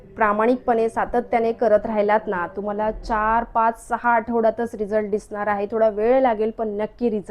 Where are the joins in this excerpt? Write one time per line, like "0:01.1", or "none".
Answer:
none

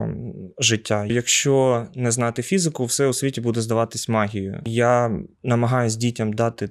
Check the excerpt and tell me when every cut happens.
0:01.1
0:04.6

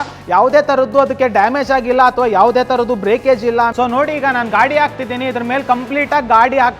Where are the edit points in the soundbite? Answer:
0:03.7

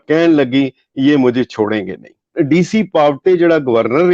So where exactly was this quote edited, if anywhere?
0:02.3

